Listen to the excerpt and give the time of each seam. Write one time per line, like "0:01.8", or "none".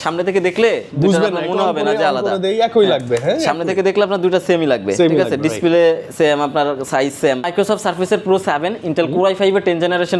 0:07.4